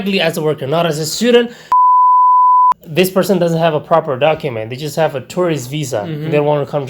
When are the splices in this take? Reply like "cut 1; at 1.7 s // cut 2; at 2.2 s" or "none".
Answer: cut 1; at 1.6 s // cut 2; at 2.8 s